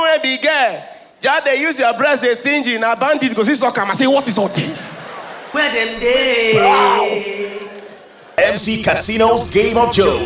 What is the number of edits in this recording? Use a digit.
1